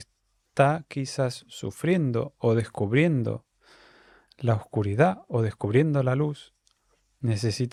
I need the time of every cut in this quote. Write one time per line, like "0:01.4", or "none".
none